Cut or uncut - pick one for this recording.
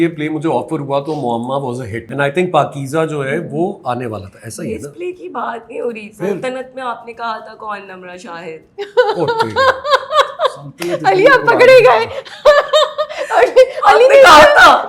cut